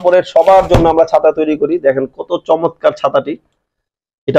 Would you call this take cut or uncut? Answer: uncut